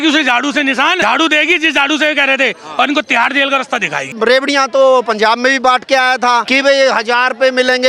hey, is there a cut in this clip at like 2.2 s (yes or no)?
no